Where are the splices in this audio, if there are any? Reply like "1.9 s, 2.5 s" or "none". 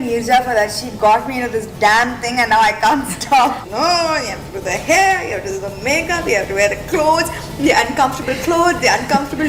3.6 s